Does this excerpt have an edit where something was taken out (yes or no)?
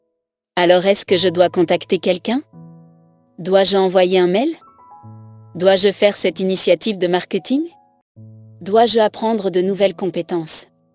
no